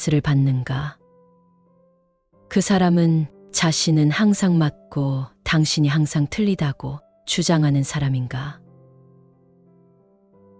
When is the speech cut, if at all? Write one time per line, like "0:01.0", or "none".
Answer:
0:08.6

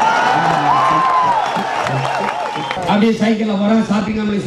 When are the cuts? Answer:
0:02.8

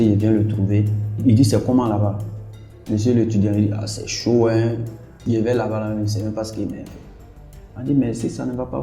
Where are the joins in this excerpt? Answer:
0:01.2
0:05.2

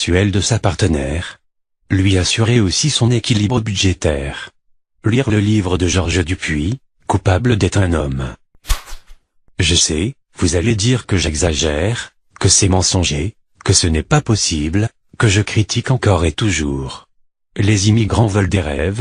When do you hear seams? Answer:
0:08.7

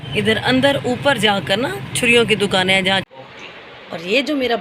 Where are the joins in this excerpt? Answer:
0:03.1

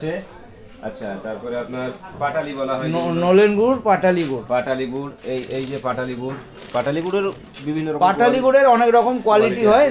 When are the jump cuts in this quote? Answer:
none

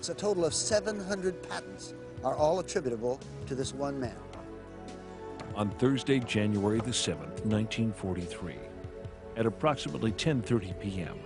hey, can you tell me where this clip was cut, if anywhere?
0:08.0

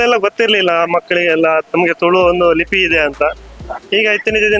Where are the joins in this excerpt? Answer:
none

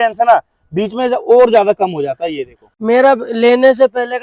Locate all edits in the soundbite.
0:02.7

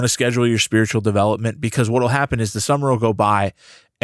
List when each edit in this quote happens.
none

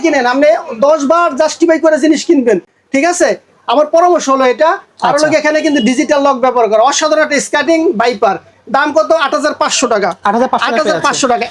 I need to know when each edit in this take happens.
none

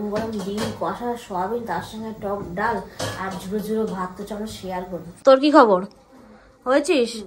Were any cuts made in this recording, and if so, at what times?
0:05.2

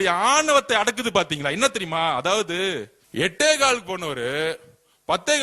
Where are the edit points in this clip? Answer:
0:03.0

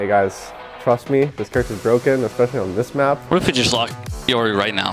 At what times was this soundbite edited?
0:03.2

